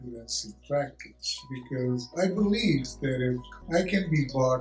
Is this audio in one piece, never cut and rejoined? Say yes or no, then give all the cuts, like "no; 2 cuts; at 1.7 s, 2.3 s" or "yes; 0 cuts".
no; 1 cut; at 3.5 s